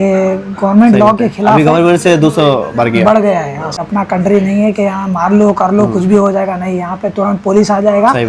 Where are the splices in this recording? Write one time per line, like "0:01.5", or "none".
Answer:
0:03.8